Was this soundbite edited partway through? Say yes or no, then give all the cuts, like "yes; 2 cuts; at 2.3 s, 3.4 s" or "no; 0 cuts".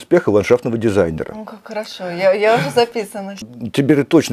yes; 1 cut; at 3.4 s